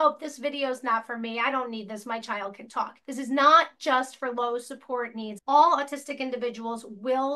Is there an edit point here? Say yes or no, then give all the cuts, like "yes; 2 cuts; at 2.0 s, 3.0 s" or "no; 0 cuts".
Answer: yes; 1 cut; at 3.0 s